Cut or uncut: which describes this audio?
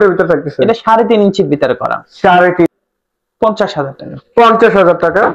cut